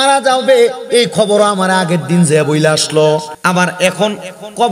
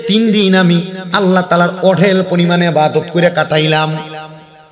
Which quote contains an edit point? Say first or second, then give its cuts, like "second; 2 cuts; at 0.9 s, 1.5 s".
first; 1 cut; at 3.3 s